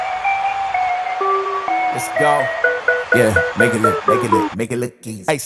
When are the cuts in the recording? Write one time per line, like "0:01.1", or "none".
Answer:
none